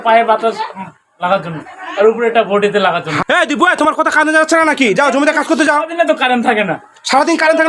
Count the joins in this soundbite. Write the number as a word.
one